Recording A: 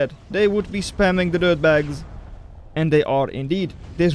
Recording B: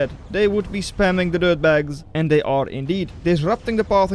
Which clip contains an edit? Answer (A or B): B